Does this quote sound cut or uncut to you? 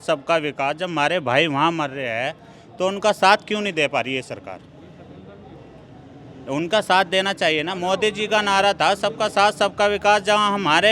uncut